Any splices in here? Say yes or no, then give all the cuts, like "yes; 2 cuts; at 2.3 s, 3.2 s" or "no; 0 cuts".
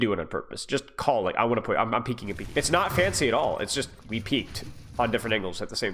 yes; 1 cut; at 2.3 s